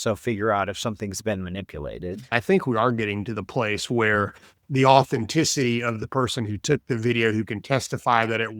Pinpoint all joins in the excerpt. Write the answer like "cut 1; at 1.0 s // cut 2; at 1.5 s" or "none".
cut 1; at 2.2 s